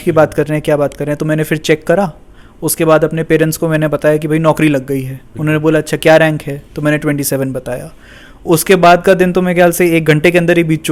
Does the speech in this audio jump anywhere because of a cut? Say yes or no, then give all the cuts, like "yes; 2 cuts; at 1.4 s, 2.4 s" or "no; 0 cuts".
no; 0 cuts